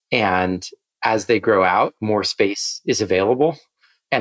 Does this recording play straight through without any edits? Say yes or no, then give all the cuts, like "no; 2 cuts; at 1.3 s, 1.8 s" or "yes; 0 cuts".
yes; 0 cuts